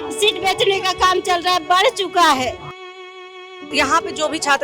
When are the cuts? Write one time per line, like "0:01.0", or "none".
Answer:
0:03.1